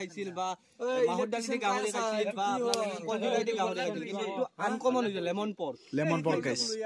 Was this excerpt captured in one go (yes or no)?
yes